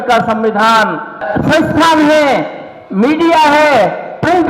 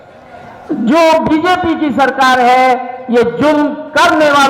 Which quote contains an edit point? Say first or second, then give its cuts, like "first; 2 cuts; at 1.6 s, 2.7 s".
first; 1 cut; at 1.3 s